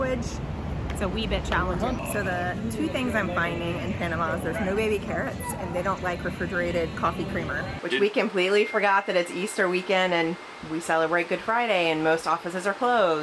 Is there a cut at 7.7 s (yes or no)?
yes